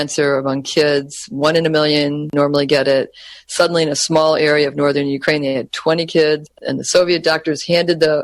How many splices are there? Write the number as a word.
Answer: two